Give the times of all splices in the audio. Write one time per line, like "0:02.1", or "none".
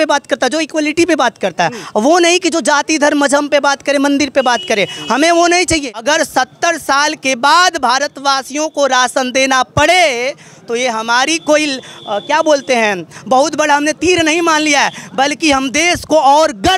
0:05.9